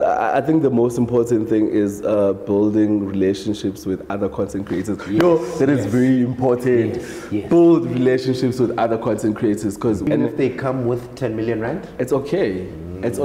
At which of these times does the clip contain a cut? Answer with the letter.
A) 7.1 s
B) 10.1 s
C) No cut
B